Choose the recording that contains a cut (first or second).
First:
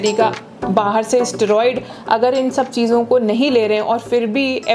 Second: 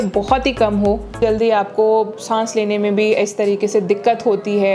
second